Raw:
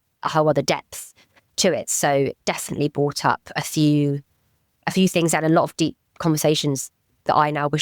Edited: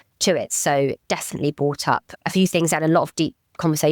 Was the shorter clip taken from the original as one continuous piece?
no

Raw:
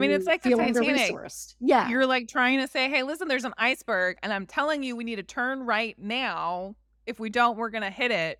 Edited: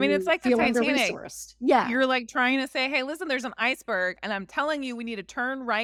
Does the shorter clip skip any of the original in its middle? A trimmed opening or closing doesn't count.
no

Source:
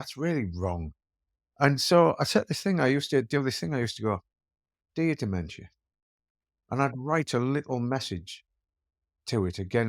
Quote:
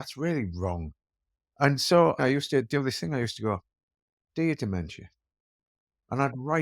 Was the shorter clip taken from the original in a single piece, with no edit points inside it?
no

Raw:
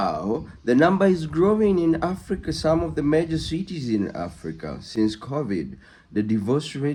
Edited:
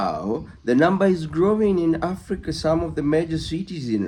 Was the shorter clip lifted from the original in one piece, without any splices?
yes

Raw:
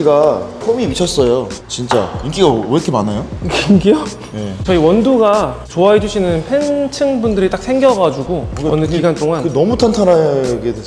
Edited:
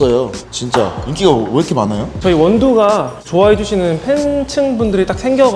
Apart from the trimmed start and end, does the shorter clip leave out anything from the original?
yes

